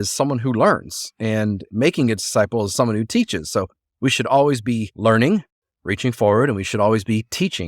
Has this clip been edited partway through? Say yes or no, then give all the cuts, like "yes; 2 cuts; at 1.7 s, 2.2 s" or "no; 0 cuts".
yes; 1 cut; at 4.9 s